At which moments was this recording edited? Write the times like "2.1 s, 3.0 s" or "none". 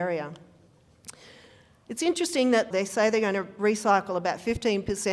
2.7 s